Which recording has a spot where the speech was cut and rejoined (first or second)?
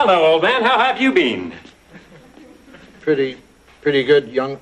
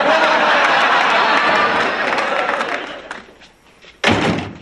second